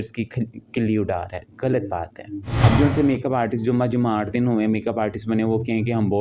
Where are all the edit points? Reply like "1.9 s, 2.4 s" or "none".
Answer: 2.5 s